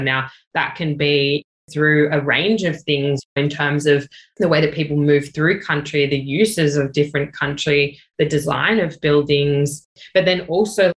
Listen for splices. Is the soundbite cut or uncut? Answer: cut